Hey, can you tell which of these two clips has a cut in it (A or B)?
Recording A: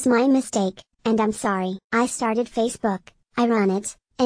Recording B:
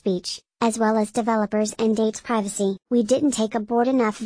A